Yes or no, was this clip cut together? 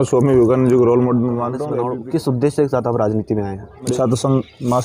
yes